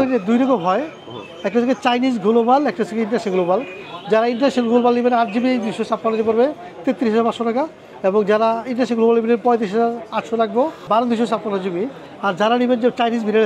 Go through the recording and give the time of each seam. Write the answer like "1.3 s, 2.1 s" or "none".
none